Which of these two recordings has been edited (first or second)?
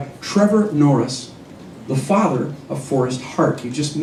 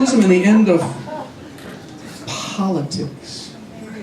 second